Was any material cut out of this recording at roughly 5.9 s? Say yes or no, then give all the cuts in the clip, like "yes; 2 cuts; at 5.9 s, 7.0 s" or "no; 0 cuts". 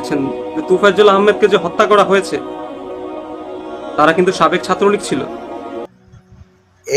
yes; 1 cut; at 5.9 s